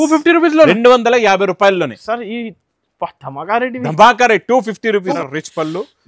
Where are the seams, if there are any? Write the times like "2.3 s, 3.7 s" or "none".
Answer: 5.2 s